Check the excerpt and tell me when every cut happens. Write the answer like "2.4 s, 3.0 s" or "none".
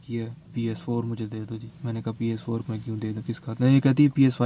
1.7 s